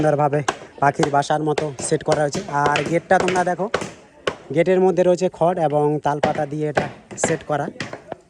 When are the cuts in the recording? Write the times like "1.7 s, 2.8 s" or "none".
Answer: none